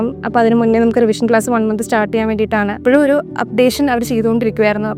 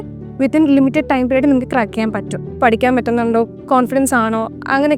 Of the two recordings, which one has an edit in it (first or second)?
second